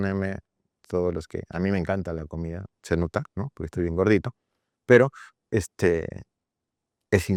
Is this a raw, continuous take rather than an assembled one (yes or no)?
yes